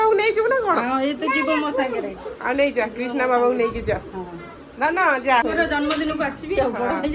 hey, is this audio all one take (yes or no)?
no